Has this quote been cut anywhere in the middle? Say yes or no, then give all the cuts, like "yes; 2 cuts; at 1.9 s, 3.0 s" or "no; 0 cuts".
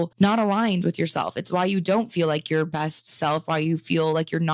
no; 0 cuts